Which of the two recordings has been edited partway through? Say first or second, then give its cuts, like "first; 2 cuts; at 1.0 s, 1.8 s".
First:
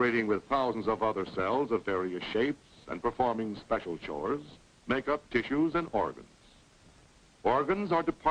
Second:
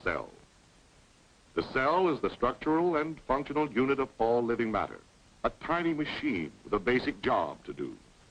first; 1 cut; at 2.0 s